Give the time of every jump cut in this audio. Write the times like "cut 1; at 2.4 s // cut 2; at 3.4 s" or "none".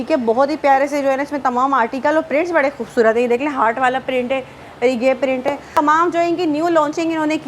cut 1; at 5.8 s